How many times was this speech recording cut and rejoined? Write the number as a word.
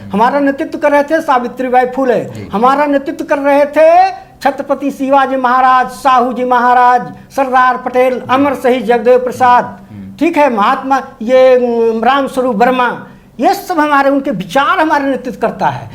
zero